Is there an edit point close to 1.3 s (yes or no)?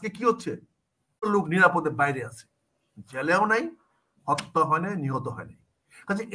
yes